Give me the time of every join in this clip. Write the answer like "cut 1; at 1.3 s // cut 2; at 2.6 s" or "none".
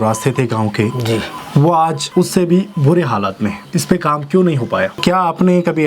cut 1; at 1.4 s // cut 2; at 2.0 s // cut 3; at 3.6 s // cut 4; at 4.9 s